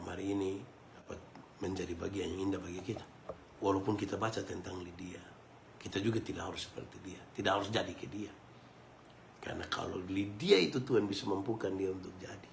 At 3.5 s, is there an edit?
yes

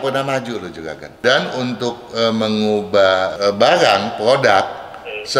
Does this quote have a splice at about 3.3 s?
yes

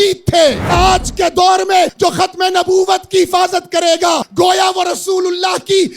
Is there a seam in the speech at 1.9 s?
yes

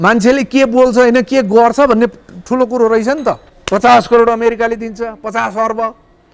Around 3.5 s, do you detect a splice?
yes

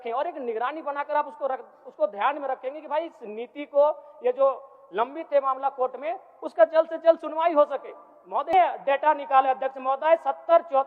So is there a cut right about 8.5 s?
yes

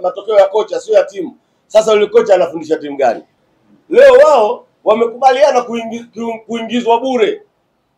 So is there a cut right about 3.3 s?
yes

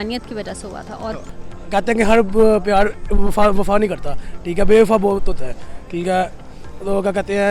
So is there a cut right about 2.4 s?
no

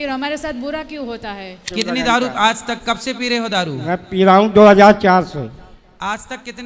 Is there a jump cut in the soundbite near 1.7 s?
yes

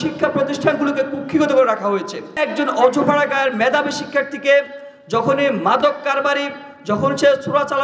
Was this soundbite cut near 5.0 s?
no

